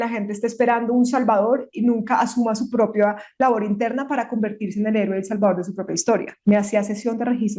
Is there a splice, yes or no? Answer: yes